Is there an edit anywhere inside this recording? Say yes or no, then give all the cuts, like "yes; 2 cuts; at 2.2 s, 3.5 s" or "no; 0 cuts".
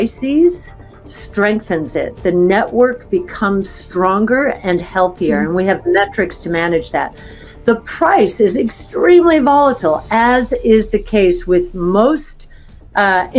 no; 0 cuts